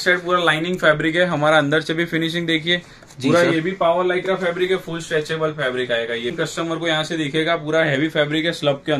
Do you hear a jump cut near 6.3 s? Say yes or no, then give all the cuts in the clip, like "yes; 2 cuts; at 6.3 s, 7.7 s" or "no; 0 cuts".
yes; 1 cut; at 6.3 s